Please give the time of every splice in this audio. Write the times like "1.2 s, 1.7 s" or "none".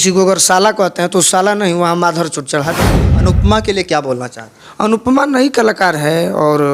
3.0 s

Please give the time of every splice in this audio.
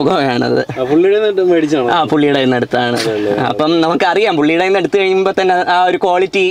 none

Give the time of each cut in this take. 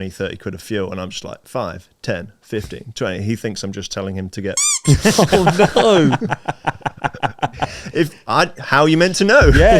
7.8 s

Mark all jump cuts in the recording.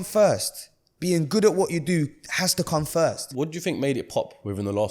3.2 s

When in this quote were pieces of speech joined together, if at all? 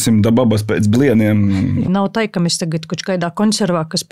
1.9 s

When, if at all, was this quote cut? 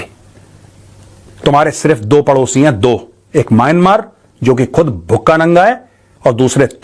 none

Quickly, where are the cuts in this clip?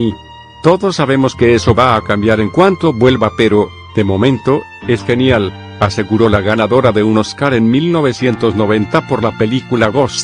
none

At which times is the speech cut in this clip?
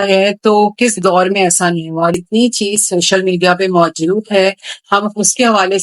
2.2 s

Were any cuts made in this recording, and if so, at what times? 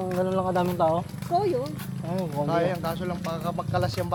none

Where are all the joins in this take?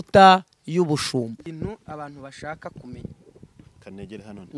1.4 s

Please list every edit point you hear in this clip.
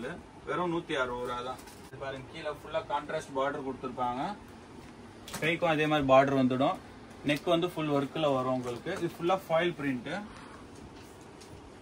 1.8 s

